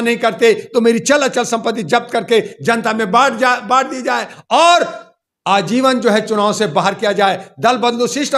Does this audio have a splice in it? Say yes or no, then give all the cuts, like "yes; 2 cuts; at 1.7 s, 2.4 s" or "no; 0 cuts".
no; 0 cuts